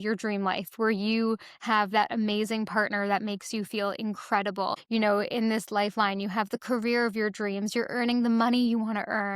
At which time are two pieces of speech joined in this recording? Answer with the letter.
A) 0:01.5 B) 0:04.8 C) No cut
B